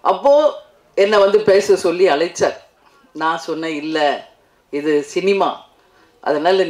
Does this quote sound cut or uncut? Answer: uncut